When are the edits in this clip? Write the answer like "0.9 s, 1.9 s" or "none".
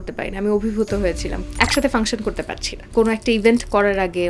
1.3 s, 2.8 s